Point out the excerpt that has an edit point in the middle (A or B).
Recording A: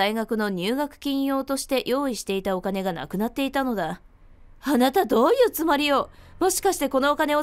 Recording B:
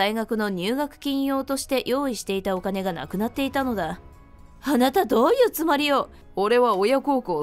B